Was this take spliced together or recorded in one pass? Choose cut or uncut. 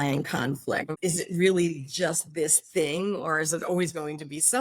cut